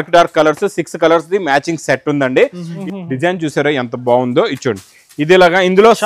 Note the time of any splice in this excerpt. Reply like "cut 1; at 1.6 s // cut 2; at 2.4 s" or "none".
cut 1; at 2.7 s